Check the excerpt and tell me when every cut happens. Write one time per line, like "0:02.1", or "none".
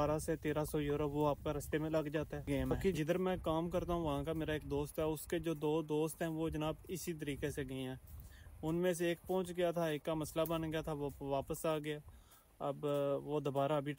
0:02.9